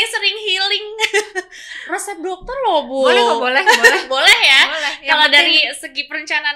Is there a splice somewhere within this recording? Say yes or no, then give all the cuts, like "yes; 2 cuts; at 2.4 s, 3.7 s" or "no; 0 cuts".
no; 0 cuts